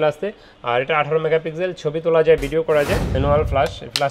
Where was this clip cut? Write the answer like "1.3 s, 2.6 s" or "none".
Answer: 3.1 s